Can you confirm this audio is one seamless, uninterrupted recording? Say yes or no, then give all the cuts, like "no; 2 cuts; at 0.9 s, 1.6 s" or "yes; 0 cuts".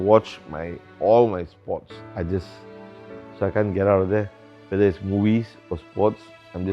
no; 1 cut; at 2.0 s